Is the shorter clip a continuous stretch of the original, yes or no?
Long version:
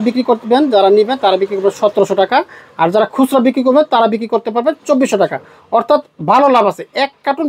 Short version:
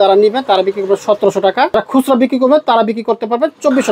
no